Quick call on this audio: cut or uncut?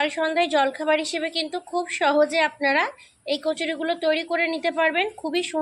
uncut